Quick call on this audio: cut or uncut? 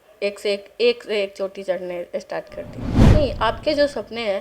cut